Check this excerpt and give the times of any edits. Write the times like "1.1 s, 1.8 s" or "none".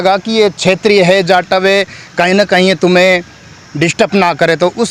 none